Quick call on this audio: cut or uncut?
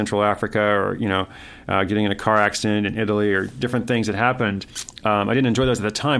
uncut